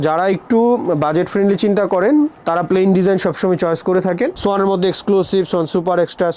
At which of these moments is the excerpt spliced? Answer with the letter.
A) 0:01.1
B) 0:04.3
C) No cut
B